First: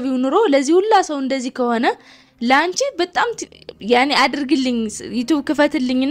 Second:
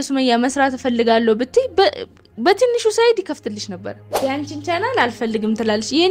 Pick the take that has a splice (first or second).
second